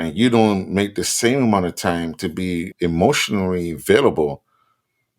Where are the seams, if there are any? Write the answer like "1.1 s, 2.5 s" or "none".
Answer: 2.7 s